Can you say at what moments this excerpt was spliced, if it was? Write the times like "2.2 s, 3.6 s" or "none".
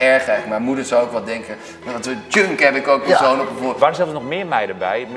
3.8 s

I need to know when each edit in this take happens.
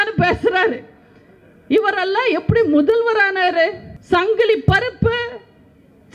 3.9 s

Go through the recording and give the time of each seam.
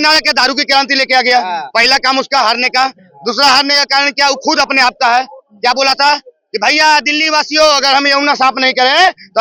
none

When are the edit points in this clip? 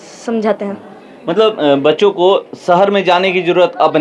none

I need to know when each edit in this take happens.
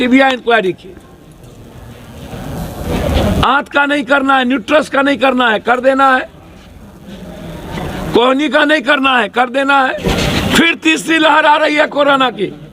2.9 s, 10.0 s

